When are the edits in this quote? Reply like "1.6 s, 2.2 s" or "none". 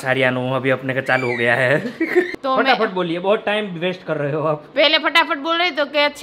2.3 s